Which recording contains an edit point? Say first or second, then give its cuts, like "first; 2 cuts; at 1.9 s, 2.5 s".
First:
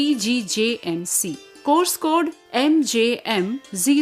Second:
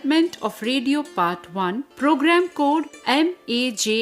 second; 1 cut; at 1.9 s